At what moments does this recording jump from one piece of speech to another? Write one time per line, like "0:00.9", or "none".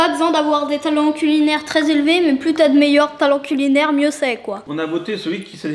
0:04.7